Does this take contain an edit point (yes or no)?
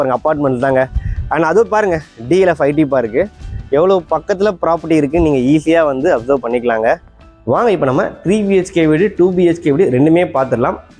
yes